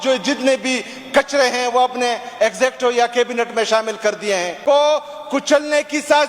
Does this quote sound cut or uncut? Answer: cut